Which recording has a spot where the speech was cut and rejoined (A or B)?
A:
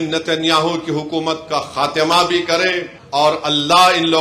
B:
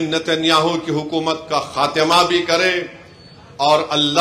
A